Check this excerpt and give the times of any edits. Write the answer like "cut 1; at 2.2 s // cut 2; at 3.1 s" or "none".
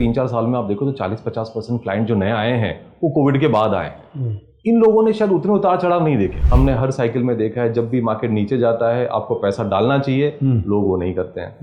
cut 1; at 6.4 s